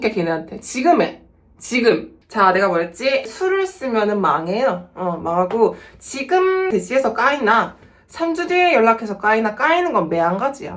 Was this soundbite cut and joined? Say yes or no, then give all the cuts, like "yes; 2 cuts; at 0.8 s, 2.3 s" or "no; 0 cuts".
no; 0 cuts